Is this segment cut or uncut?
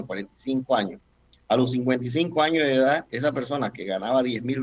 uncut